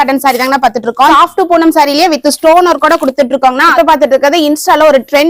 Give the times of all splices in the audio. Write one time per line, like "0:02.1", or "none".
0:01.1
0:03.7